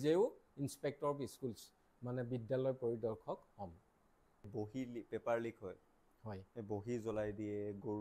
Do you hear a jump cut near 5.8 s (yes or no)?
no